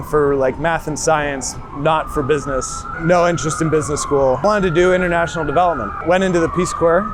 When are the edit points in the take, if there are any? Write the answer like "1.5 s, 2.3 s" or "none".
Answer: 2.8 s, 4.4 s, 6.0 s